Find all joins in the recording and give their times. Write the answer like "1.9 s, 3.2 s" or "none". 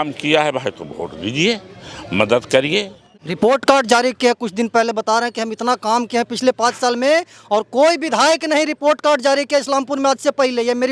2.5 s